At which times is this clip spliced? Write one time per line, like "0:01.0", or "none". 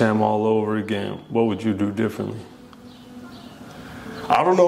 none